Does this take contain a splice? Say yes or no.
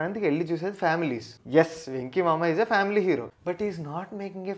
yes